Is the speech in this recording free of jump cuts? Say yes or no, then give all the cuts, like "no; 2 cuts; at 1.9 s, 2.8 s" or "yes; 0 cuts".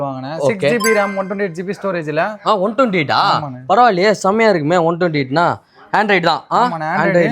yes; 0 cuts